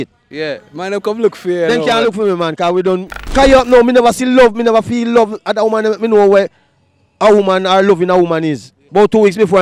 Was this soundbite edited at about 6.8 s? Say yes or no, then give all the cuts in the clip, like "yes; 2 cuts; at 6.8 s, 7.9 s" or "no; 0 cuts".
no; 2 cuts; at 3.2 s, 8.8 s